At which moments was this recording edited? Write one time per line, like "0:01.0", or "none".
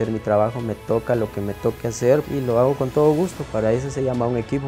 none